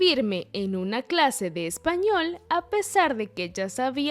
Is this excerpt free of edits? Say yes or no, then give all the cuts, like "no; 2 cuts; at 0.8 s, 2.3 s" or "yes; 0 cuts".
yes; 0 cuts